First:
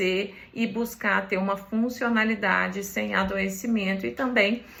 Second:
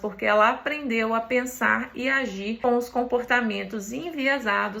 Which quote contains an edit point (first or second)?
second